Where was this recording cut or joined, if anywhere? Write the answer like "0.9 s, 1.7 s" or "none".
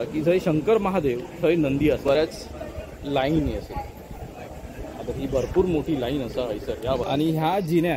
2.1 s, 7.0 s